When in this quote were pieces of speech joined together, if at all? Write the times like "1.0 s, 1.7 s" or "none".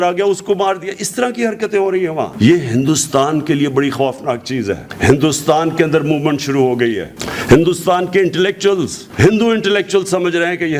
4.9 s